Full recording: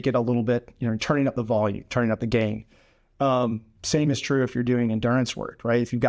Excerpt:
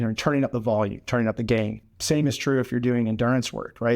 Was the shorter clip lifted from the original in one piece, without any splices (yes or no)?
no